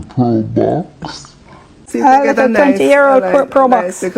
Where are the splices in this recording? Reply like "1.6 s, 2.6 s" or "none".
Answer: 1.7 s